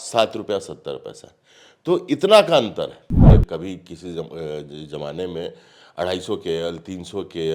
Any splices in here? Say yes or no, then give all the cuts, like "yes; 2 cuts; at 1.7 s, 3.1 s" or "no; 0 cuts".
yes; 1 cut; at 3.3 s